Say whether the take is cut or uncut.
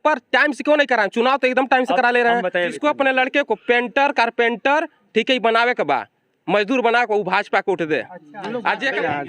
cut